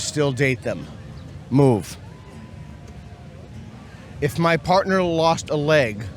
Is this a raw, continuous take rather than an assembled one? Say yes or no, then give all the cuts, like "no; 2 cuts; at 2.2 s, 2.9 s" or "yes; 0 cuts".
no; 1 cut; at 3.7 s